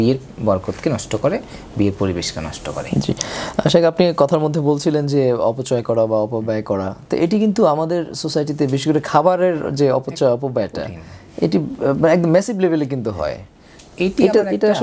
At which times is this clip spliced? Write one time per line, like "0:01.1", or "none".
none

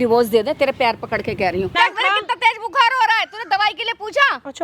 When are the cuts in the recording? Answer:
0:01.7

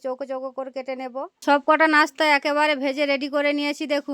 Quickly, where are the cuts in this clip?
0:01.3

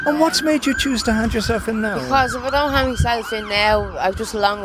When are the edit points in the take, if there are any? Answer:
none

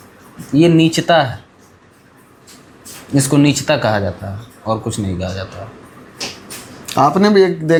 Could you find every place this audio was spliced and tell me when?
none

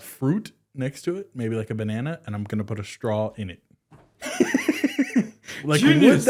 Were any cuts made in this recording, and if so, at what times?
none

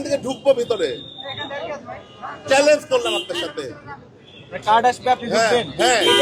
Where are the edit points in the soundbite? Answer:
none

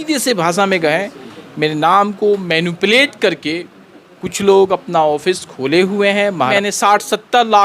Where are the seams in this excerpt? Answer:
0:06.5

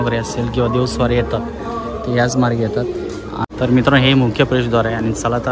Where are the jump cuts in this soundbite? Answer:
0:03.4

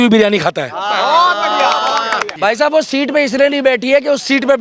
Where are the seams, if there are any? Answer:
0:02.3

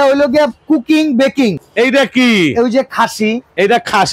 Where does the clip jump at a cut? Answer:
0:01.6

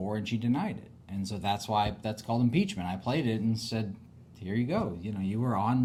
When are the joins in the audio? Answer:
none

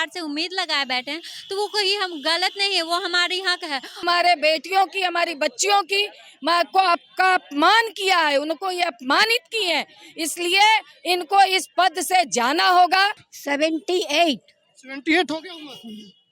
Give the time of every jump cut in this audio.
0:04.0
0:13.3

